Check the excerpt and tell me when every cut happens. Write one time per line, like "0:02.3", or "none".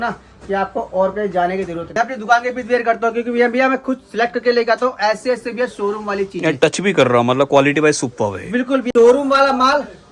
0:01.8
0:08.8